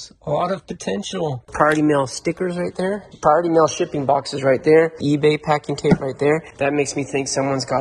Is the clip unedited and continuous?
no; 3 cuts; at 1.5 s, 5.0 s, 6.5 s

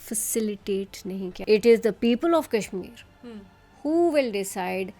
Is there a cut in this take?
yes; 1 cut; at 1.4 s

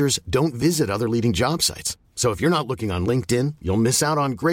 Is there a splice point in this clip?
no; 0 cuts

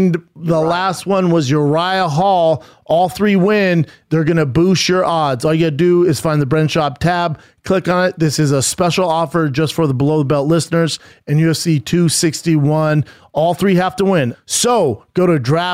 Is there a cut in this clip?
yes; 1 cut; at 14.3 s

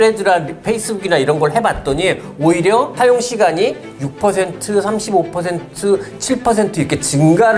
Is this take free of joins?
yes; 0 cuts

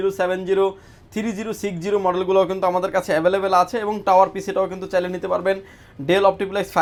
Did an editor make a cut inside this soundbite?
no; 0 cuts

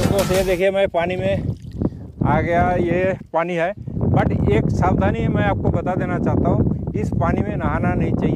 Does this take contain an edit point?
no; 0 cuts

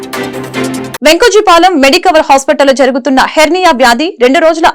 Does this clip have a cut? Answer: yes; 1 cut; at 0.9 s

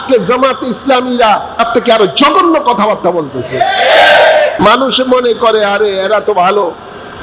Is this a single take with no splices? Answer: no; 2 cuts; at 1.7 s, 4.5 s

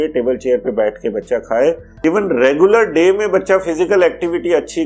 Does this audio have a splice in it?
yes; 1 cut; at 1.9 s

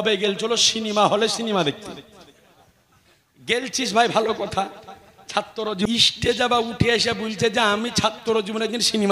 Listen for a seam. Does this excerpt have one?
yes; 1 cut; at 5.9 s

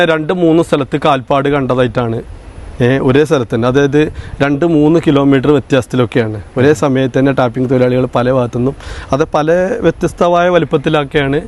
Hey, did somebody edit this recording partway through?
no; 0 cuts

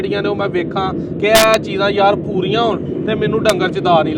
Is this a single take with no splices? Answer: yes; 0 cuts

